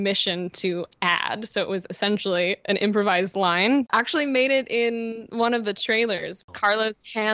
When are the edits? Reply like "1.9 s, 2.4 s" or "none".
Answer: 3.9 s, 6.4 s